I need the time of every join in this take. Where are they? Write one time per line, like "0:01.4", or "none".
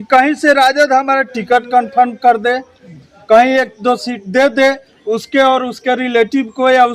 none